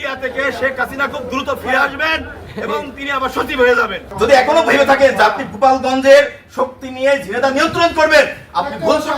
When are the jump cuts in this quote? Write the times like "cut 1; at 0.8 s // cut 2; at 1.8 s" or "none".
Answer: cut 1; at 4.0 s